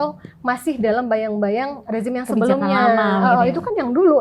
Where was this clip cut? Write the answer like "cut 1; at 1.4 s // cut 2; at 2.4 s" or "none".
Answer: cut 1; at 1.8 s